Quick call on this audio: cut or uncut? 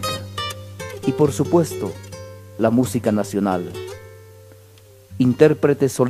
uncut